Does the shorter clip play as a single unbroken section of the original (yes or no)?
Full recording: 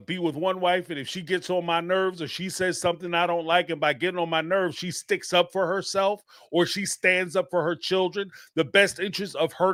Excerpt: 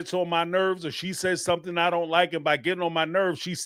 yes